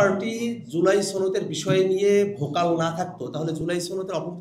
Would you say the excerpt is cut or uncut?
uncut